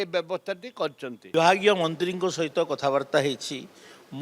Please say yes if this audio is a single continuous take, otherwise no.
no